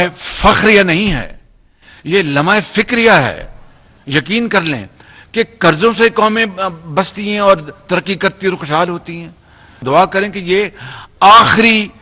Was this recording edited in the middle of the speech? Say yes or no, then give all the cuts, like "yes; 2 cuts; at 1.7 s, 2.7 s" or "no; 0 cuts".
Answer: yes; 1 cut; at 9.8 s